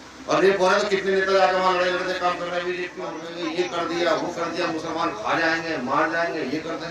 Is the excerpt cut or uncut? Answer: cut